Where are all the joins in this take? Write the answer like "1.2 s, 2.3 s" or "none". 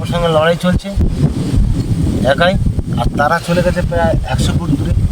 none